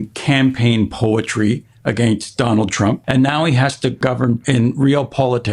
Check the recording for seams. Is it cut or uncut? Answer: cut